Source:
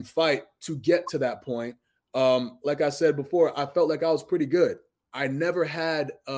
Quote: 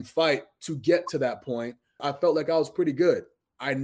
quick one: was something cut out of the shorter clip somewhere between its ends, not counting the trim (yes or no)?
yes